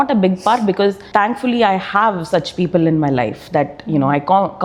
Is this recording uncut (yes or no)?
yes